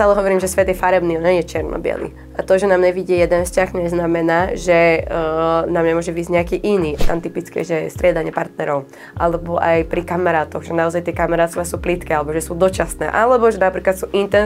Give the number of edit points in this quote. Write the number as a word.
one